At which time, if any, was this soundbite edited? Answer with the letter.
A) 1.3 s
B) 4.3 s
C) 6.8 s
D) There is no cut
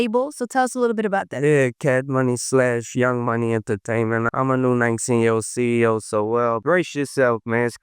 B